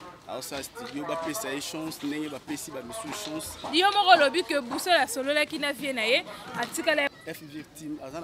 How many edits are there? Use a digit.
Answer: 1